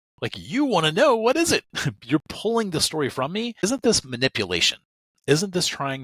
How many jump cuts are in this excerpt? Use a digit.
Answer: 1